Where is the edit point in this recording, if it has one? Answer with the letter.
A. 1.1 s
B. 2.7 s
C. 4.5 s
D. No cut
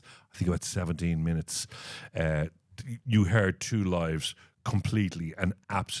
D